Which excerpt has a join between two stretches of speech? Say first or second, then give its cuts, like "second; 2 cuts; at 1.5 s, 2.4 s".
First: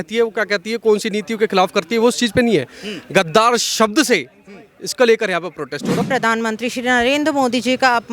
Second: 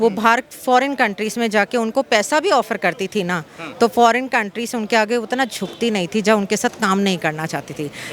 first; 1 cut; at 6.0 s